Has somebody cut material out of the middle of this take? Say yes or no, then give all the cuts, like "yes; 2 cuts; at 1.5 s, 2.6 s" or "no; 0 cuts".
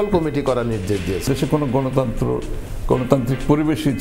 yes; 1 cut; at 1.2 s